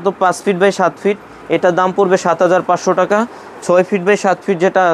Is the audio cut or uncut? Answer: uncut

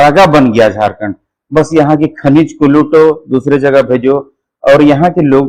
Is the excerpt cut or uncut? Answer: uncut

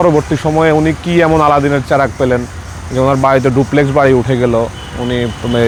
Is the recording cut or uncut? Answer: uncut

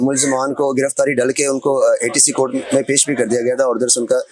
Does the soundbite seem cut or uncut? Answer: uncut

